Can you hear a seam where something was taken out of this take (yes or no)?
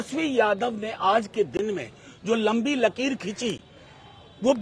no